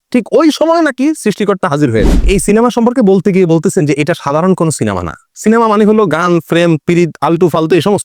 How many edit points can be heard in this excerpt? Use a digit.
1